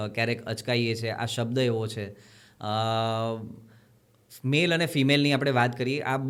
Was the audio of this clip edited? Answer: no; 0 cuts

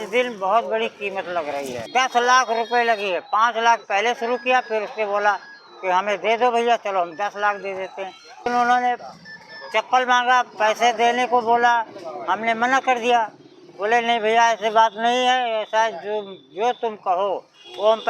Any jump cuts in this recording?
yes; 2 cuts; at 1.8 s, 8.4 s

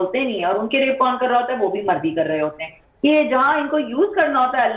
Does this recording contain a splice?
yes; 1 cut; at 2.8 s

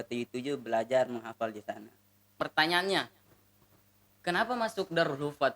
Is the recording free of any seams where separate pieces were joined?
no; 1 cut; at 2.4 s

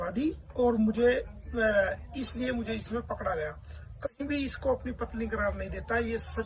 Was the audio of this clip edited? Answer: no; 0 cuts

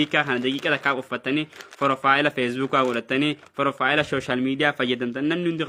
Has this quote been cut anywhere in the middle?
no; 0 cuts

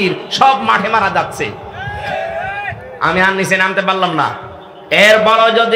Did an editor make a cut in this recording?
no; 0 cuts

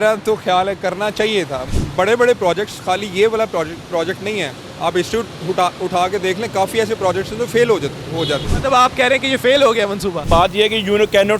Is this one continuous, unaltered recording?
no; 3 cuts; at 1.7 s, 8.5 s, 10.2 s

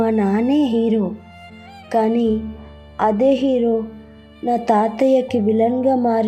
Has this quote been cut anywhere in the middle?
no; 0 cuts

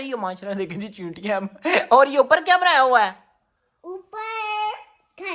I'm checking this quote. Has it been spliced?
no; 0 cuts

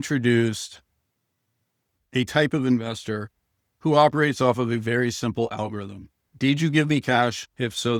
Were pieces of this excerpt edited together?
no; 0 cuts

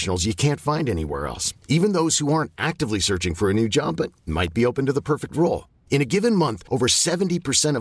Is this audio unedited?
yes; 0 cuts

